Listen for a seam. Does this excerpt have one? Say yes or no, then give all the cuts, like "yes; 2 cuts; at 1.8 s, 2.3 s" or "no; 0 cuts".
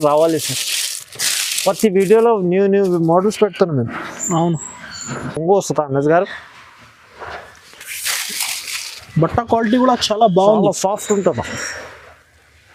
no; 0 cuts